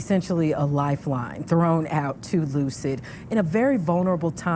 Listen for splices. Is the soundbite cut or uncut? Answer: uncut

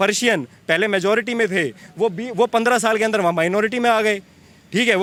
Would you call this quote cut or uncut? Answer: uncut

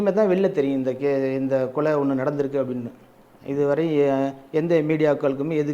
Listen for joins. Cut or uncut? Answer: uncut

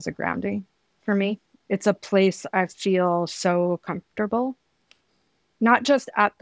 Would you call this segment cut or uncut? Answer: uncut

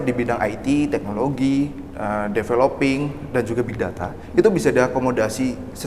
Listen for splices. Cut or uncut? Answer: uncut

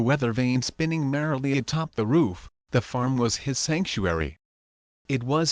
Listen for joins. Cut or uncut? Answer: uncut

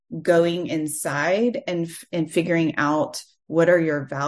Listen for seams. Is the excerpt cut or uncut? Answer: uncut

